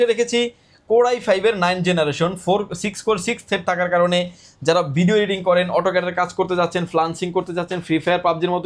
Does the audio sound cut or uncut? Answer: uncut